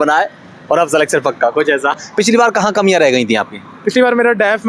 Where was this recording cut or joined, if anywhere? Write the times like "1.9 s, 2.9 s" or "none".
2.0 s